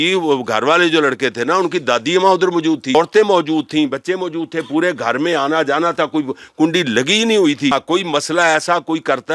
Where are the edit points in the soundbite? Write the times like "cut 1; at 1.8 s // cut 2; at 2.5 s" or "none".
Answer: cut 1; at 2.9 s // cut 2; at 7.7 s